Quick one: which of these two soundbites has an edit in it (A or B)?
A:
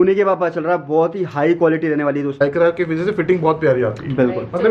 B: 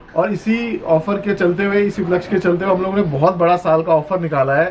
A